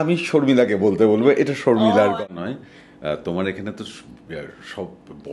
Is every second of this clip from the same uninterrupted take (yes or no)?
no